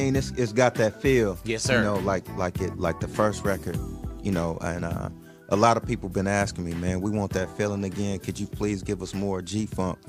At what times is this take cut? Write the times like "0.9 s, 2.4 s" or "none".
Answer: none